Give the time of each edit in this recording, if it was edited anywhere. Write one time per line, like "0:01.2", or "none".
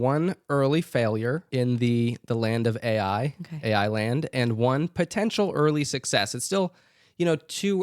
0:01.5